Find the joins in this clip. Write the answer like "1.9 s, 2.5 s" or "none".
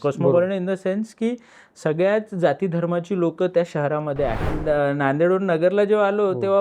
4.5 s